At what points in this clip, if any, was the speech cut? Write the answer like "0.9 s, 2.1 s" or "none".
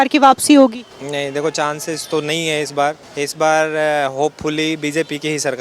0.9 s, 3.1 s